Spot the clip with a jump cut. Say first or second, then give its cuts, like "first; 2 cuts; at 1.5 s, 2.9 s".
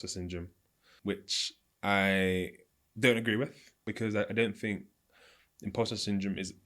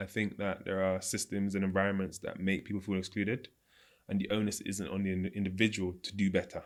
first; 2 cuts; at 0.9 s, 3.8 s